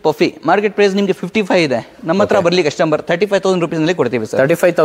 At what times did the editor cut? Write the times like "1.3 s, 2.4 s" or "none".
none

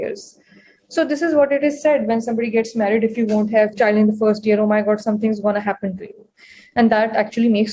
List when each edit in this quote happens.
3.7 s

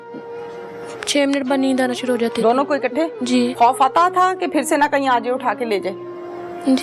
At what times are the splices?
3.5 s

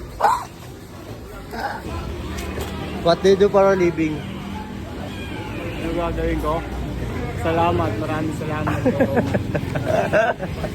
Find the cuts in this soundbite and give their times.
1.9 s

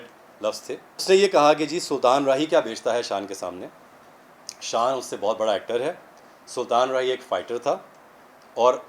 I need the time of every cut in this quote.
0.9 s

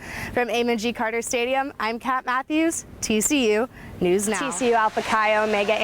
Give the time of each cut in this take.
4.5 s

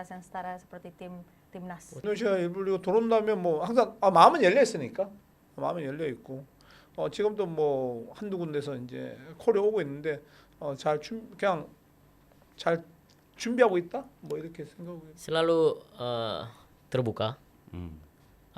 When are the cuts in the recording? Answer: 2.0 s

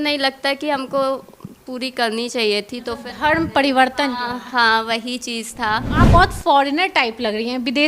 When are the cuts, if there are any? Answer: 5.9 s

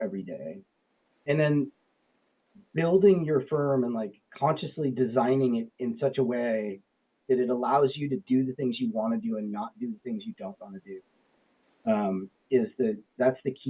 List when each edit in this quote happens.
none

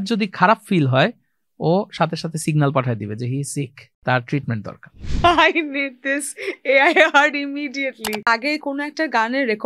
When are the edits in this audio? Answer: 3.8 s, 5.0 s, 8.3 s

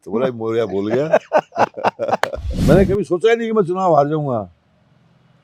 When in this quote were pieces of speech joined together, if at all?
2.6 s

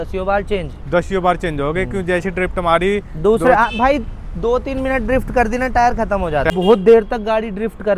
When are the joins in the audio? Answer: 6.5 s

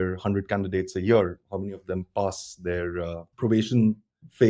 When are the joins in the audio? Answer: 1.4 s, 3.2 s

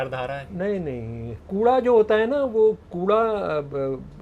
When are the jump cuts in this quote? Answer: 1.4 s

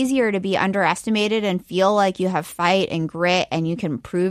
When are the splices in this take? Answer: none

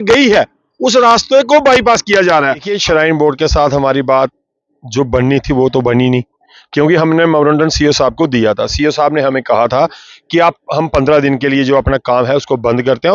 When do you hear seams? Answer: 2.7 s

